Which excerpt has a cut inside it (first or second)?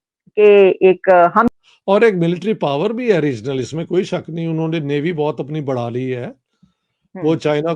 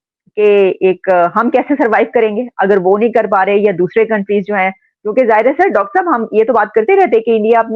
first